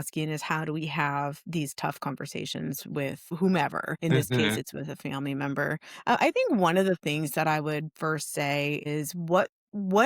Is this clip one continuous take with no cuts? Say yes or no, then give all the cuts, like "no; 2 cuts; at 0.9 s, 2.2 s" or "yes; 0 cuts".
no; 3 cuts; at 3.3 s, 3.9 s, 8.8 s